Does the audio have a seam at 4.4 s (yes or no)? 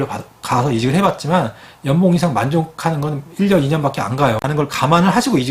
yes